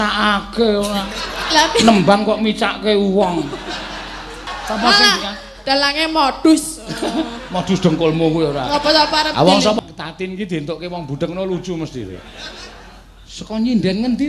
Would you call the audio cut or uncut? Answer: cut